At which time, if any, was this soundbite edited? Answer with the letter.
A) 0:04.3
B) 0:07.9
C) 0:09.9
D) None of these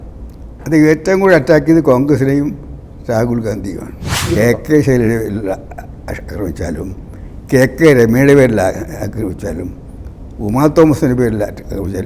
A